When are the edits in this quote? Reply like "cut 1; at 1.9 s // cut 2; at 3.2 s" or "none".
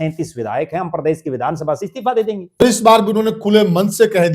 cut 1; at 2.6 s